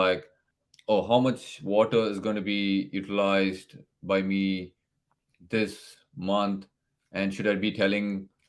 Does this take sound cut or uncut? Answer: uncut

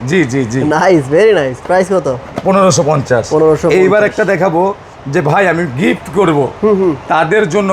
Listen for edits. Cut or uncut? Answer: uncut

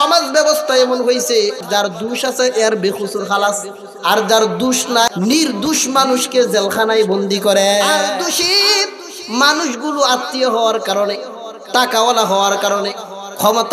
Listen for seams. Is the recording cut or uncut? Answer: cut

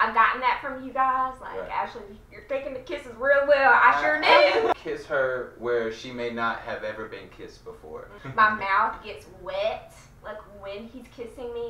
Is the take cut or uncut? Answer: cut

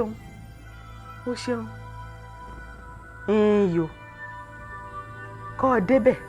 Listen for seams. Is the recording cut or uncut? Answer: cut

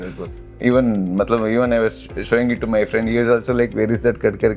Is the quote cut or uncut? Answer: uncut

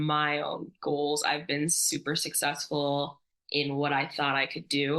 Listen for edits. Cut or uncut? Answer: uncut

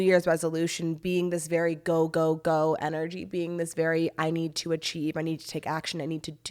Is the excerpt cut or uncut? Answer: uncut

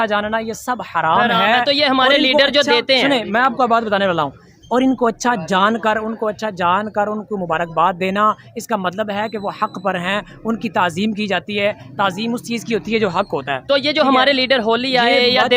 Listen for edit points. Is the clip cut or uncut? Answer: uncut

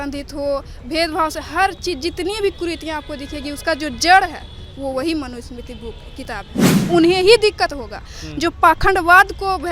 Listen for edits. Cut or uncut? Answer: cut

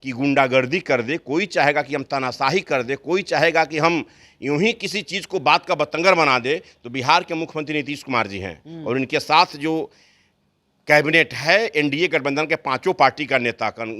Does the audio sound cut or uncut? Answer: uncut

